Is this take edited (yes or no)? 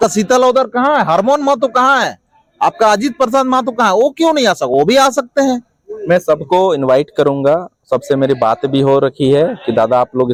no